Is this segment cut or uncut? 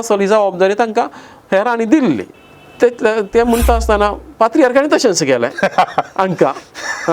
cut